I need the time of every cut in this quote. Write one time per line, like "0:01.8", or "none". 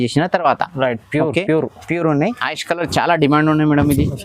0:02.3